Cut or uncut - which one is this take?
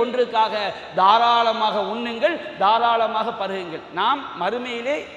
uncut